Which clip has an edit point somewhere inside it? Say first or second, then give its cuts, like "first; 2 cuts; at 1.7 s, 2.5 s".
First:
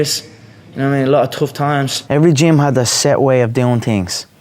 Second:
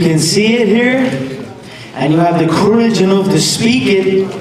first; 1 cut; at 2.0 s